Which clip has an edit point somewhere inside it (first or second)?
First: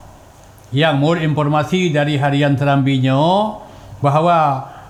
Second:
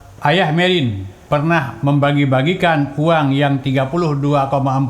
second